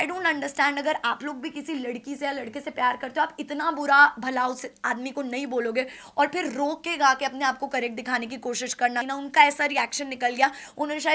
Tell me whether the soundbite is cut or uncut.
cut